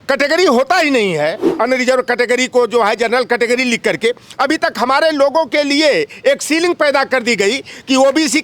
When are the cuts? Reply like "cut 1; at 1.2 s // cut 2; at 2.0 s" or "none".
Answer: cut 1; at 1.5 s